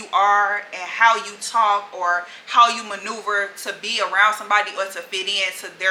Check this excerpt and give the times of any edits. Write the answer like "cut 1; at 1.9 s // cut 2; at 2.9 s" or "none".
none